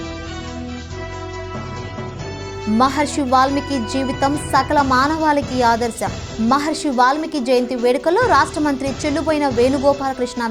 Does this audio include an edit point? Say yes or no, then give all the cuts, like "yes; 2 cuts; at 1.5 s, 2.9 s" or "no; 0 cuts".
yes; 1 cut; at 2.3 s